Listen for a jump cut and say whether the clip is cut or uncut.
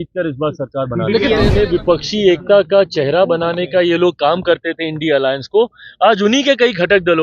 cut